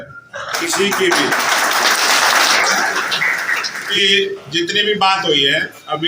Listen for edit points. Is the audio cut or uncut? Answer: cut